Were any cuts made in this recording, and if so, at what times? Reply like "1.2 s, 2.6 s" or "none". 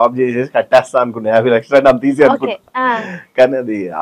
none